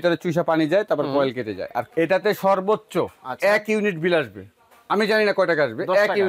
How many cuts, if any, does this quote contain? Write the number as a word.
one